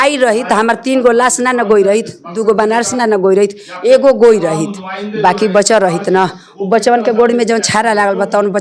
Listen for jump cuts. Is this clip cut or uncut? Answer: uncut